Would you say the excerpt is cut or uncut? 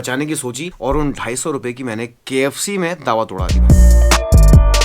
cut